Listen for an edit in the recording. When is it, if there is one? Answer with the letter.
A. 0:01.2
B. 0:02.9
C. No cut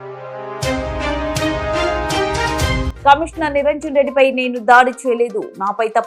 C